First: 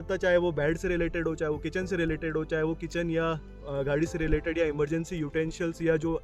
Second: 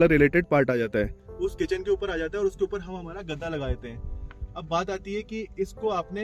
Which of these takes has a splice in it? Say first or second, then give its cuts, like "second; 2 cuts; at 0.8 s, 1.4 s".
second; 1 cut; at 1.2 s